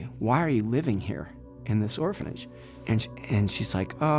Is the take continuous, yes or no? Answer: no